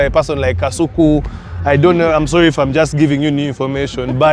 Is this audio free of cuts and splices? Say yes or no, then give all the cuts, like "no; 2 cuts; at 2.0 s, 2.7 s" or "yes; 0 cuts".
yes; 0 cuts